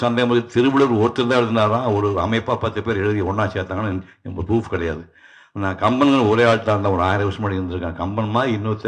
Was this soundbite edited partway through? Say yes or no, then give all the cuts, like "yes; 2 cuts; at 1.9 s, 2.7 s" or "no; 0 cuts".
no; 0 cuts